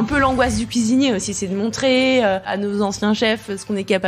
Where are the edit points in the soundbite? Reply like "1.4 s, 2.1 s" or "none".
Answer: 2.5 s